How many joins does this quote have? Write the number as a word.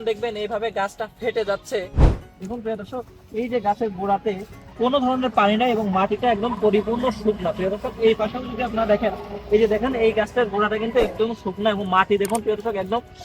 one